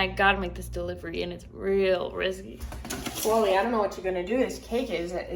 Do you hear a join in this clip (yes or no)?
no